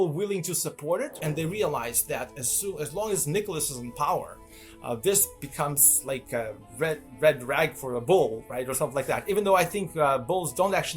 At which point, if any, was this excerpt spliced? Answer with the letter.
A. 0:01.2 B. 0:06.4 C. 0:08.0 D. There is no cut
A